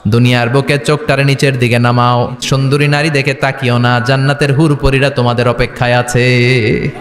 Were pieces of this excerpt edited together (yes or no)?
yes